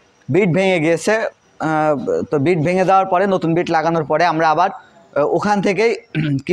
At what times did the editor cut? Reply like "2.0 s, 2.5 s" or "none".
none